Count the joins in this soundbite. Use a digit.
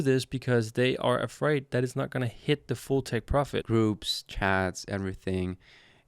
1